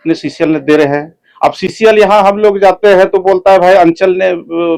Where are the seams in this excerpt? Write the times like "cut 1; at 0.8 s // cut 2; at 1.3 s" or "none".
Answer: none